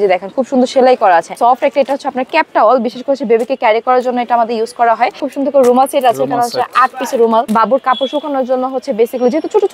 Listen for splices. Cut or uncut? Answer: cut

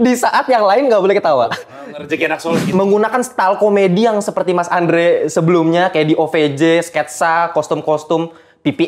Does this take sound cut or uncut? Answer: cut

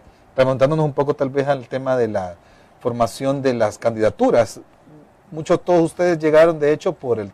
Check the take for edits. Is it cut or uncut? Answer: uncut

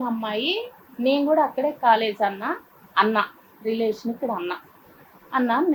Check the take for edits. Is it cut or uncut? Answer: uncut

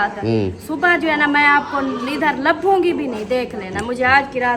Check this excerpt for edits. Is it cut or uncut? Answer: uncut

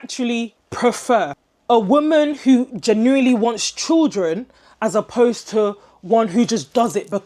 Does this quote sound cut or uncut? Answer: uncut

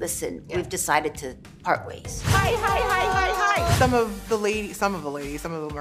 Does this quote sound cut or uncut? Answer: cut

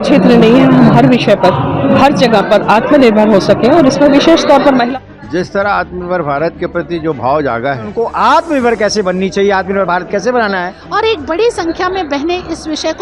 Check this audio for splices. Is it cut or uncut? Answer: cut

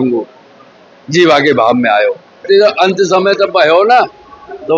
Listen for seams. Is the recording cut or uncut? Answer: cut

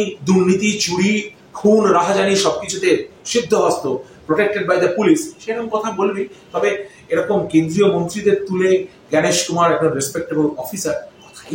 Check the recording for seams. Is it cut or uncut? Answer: uncut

